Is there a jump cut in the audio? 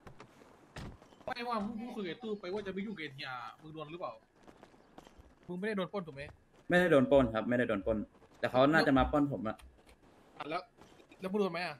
yes; 1 cut; at 5.5 s

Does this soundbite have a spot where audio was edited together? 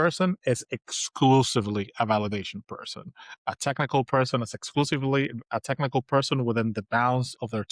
no; 0 cuts

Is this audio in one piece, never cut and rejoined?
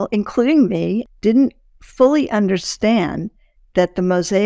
no; 1 cut; at 1.1 s

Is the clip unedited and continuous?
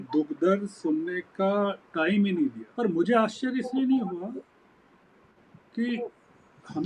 no; 1 cut; at 2.6 s

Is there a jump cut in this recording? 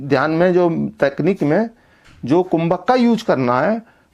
no; 0 cuts

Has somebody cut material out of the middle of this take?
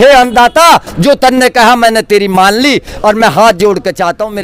no; 0 cuts

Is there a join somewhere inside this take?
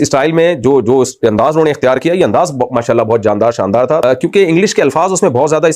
yes; 1 cut; at 4.0 s

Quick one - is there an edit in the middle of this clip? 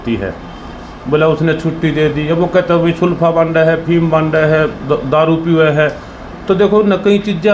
no; 0 cuts

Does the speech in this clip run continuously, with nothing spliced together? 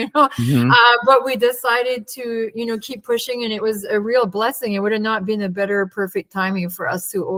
yes; 0 cuts

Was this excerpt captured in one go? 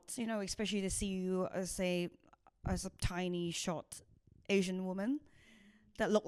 yes; 0 cuts

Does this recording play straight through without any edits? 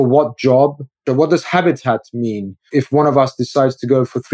no; 2 cuts; at 1.0 s, 2.8 s

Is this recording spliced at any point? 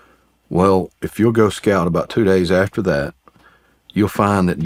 no; 0 cuts

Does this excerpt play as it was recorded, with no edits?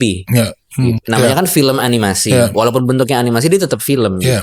no; 1 cut; at 1.0 s

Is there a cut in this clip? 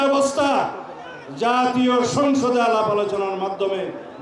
no; 0 cuts

